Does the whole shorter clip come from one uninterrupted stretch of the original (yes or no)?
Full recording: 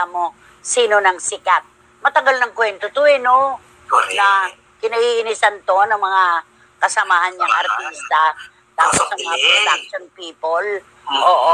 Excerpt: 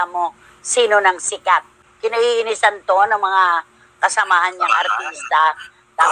no